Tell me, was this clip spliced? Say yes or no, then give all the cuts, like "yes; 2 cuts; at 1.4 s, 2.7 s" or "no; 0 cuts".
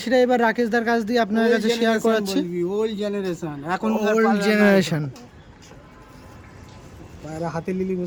no; 0 cuts